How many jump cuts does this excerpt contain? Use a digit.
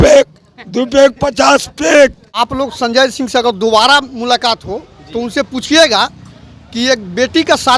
1